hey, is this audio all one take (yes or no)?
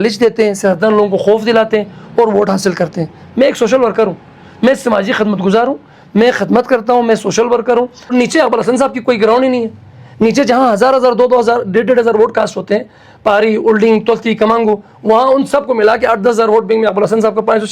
no